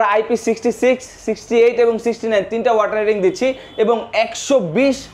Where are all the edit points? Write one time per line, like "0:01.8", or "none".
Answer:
none